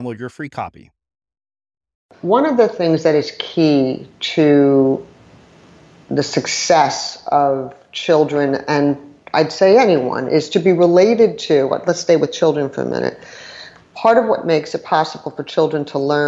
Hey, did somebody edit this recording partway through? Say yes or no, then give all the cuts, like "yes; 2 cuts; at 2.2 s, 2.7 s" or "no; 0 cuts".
yes; 1 cut; at 2.1 s